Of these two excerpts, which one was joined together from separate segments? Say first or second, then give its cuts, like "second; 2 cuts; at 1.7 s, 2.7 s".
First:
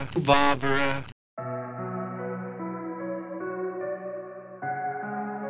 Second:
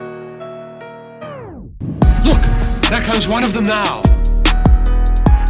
first; 1 cut; at 1.0 s